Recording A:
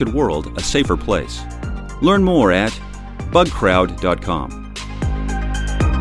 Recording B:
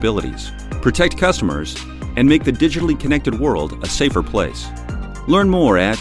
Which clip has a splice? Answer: A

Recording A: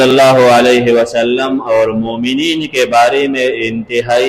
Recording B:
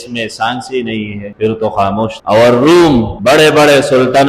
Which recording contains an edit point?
B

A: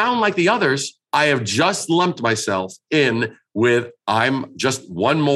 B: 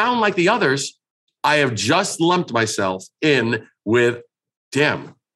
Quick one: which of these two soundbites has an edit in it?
A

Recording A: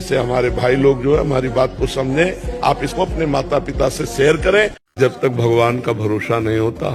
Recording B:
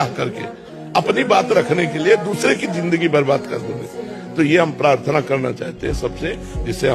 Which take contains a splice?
A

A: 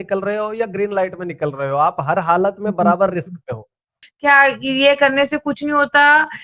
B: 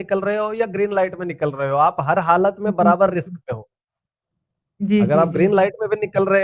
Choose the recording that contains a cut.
A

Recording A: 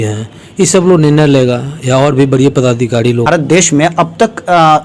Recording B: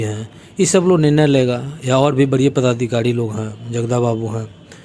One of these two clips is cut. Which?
A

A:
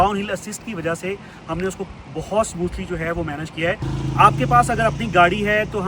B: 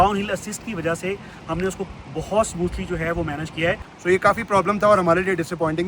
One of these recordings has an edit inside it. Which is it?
B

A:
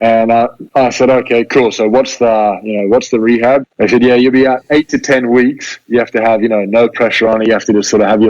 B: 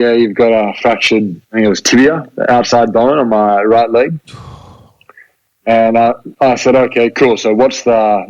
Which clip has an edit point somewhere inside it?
A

